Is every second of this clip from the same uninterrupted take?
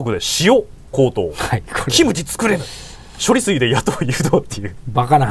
yes; 0 cuts

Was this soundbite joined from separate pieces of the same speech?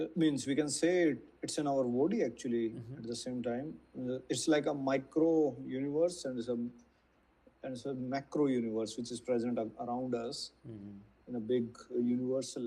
no; 0 cuts

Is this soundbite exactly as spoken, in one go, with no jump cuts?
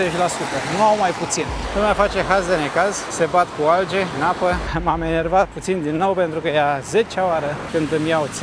no; 4 cuts; at 1.6 s, 3.0 s, 4.4 s, 7.6 s

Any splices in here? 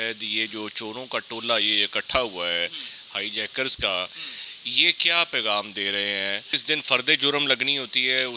yes; 1 cut; at 6.6 s

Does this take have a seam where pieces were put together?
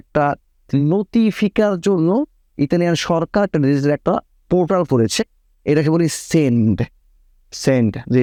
no; 0 cuts

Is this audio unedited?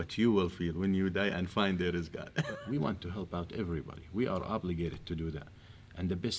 no; 1 cut; at 2.5 s

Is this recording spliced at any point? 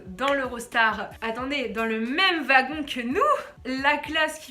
no; 0 cuts

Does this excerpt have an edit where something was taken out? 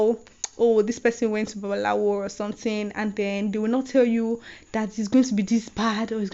no; 0 cuts

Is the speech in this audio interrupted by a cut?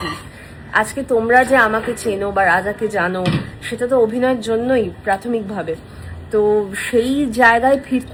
no; 0 cuts

